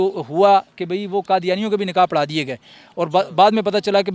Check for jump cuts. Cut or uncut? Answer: uncut